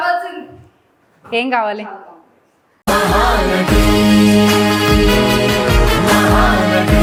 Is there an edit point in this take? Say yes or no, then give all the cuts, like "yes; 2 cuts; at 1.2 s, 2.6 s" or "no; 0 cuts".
no; 0 cuts